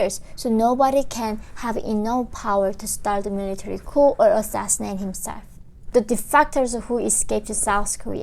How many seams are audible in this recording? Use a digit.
1